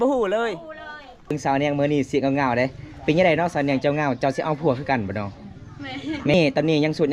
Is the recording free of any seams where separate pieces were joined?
no; 2 cuts; at 1.3 s, 6.3 s

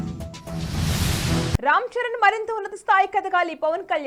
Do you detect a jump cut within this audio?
no; 0 cuts

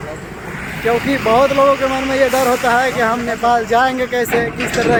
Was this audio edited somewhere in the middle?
no; 0 cuts

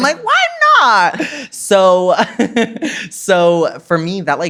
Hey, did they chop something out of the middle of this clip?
no; 0 cuts

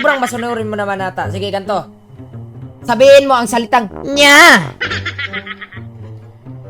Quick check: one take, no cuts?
no; 1 cut; at 5.7 s

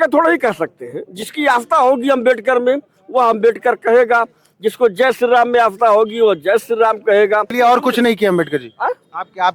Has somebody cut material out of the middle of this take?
yes; 1 cut; at 7.5 s

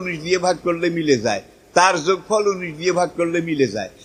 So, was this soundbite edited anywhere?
no; 0 cuts

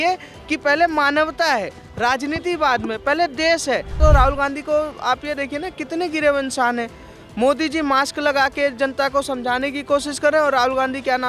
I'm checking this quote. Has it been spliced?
yes; 1 cut; at 4.0 s

